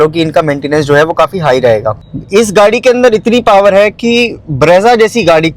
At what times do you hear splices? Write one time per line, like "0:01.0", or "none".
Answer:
0:01.9